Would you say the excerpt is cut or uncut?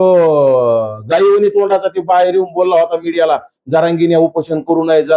uncut